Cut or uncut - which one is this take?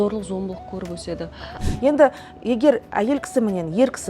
cut